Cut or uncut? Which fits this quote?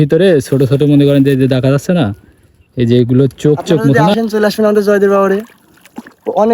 cut